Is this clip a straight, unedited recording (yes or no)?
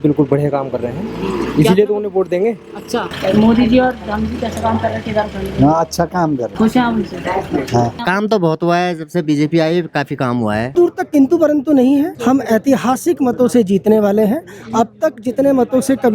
no